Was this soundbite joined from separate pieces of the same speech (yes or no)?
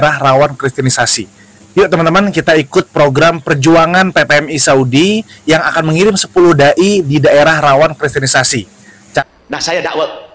yes